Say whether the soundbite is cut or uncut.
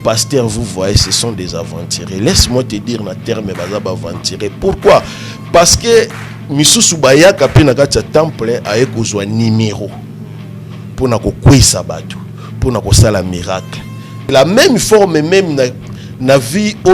cut